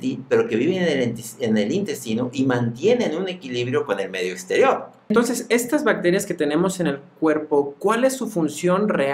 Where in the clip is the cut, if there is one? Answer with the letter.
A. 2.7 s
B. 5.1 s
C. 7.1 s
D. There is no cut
B